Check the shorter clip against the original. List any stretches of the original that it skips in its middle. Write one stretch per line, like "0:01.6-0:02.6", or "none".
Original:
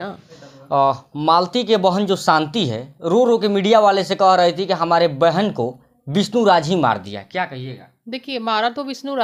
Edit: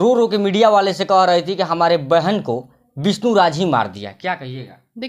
none